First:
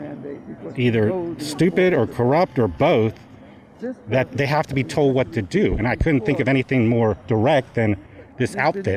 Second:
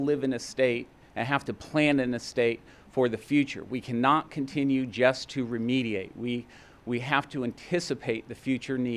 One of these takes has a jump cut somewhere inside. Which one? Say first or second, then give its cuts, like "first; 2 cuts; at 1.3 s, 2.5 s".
first; 1 cut; at 4.3 s